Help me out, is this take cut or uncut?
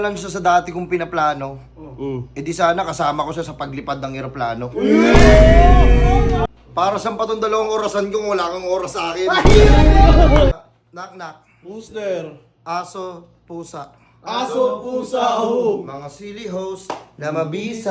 cut